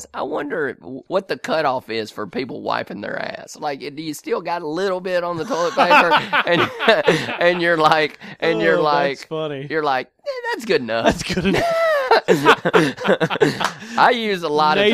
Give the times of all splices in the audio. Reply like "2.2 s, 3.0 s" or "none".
1.0 s